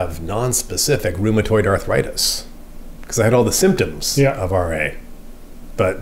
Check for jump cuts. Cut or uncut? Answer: uncut